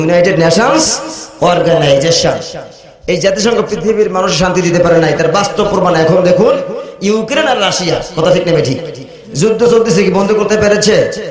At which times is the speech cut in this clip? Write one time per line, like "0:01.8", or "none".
none

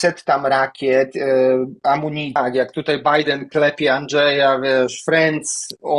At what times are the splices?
0:02.4

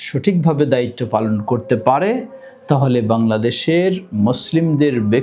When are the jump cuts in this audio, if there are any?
none

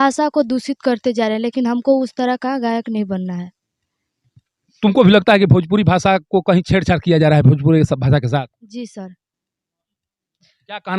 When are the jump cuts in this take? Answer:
none

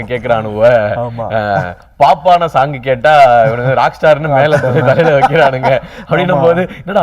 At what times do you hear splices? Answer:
none

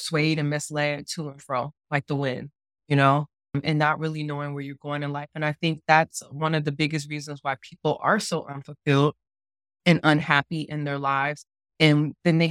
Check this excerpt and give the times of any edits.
0:03.6

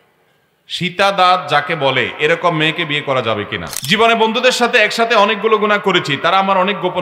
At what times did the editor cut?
0:03.7

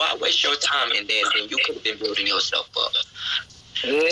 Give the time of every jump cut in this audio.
none

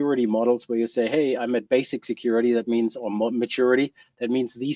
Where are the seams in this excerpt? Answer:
none

